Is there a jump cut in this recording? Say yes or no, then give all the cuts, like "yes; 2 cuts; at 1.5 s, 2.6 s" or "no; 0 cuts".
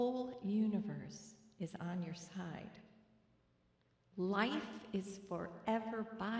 no; 0 cuts